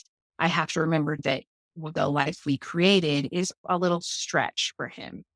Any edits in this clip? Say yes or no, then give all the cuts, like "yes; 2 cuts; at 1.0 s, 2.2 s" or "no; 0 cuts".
yes; 2 cuts; at 1.2 s, 3.6 s